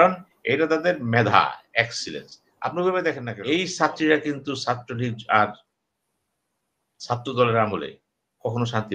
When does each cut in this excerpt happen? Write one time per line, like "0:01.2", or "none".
0:03.3